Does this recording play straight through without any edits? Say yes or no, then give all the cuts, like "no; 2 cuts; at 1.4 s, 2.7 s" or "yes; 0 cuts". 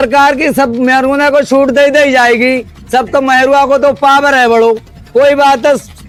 yes; 0 cuts